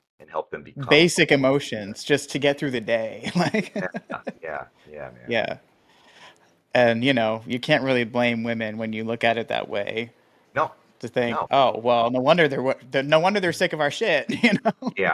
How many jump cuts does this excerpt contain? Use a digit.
0